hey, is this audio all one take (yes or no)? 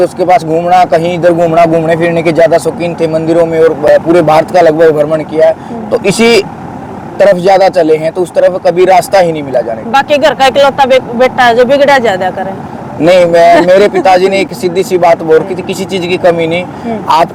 yes